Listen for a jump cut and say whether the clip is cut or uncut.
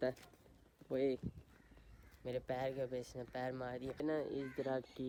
uncut